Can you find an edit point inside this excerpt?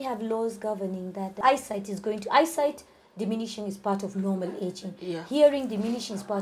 yes; 1 cut; at 1.4 s

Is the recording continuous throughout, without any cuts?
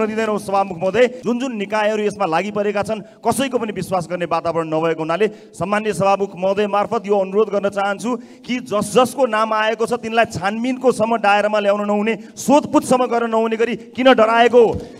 no; 1 cut; at 1.2 s

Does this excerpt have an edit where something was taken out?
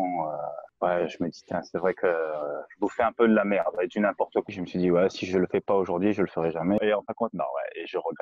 yes; 2 cuts; at 4.5 s, 6.8 s

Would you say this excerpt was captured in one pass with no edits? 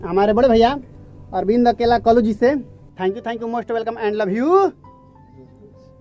no; 1 cut; at 2.8 s

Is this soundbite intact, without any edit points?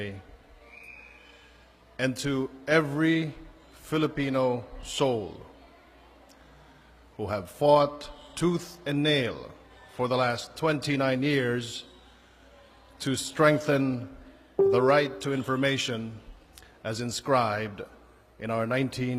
no; 1 cut; at 2.1 s

